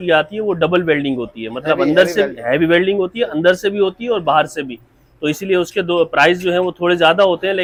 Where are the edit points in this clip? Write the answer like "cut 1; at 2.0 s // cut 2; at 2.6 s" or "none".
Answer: none